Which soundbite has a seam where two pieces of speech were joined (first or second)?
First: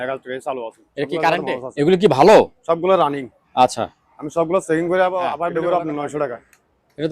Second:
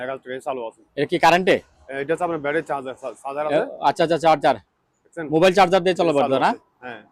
first